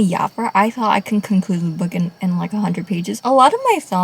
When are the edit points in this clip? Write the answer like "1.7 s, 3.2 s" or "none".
3.1 s